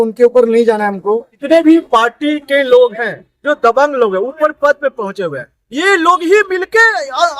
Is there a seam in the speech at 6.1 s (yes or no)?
no